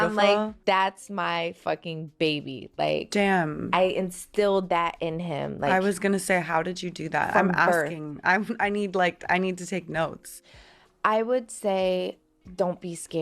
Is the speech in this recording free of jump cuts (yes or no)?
no